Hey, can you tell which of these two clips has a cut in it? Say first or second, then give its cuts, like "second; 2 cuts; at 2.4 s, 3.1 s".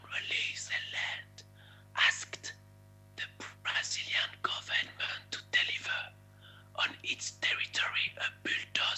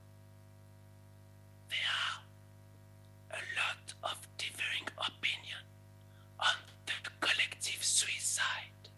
second; 1 cut; at 1.7 s